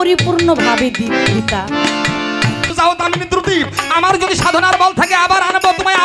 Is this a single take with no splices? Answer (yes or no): no